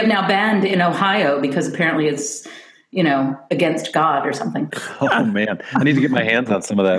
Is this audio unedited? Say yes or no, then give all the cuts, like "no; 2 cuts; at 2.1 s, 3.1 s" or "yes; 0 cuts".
no; 1 cut; at 4.8 s